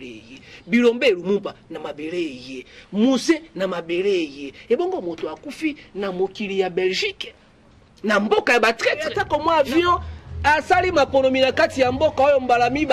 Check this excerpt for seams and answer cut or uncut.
cut